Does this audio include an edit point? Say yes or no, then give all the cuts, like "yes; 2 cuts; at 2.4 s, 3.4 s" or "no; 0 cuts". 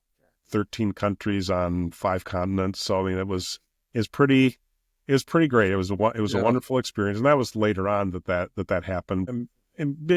yes; 1 cut; at 9.3 s